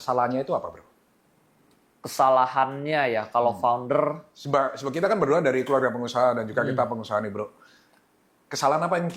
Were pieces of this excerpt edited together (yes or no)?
no